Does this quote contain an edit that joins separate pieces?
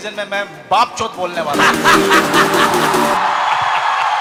no; 0 cuts

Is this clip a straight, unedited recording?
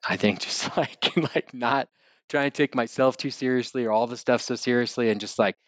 yes; 0 cuts

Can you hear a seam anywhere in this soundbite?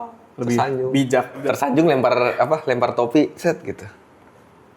yes; 1 cut; at 1.4 s

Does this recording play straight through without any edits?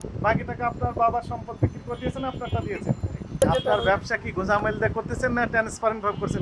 no; 1 cut; at 3.4 s

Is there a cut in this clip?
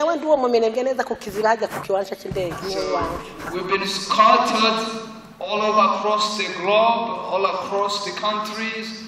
no; 0 cuts

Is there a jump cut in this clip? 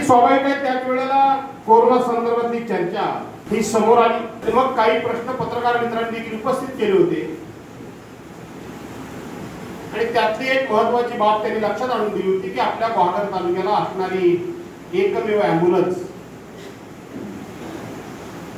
yes; 3 cuts; at 1.5 s, 3.3 s, 4.3 s

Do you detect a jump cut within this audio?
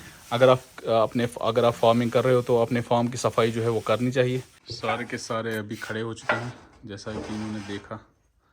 yes; 1 cut; at 4.6 s

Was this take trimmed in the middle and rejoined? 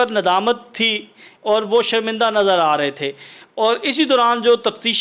no; 0 cuts

